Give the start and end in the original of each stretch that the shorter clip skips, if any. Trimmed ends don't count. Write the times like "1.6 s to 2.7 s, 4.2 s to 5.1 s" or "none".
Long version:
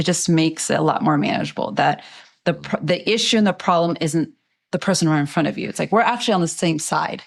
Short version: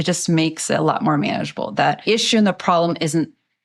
2.0 s to 3.0 s